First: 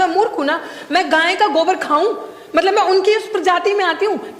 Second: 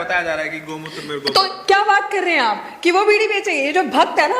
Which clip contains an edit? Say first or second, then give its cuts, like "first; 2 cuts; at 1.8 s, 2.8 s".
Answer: second; 1 cut; at 1.4 s